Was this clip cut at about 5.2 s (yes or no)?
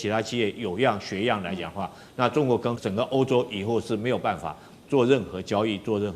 no